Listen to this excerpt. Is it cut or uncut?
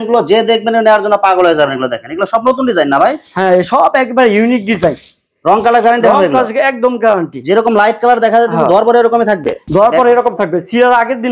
uncut